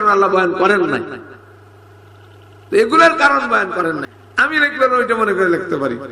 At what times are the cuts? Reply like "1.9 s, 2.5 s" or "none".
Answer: 4.1 s